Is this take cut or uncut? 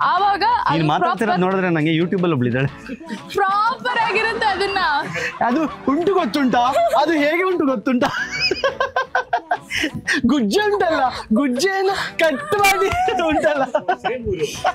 uncut